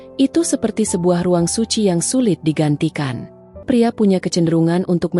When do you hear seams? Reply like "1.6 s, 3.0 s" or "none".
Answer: 3.6 s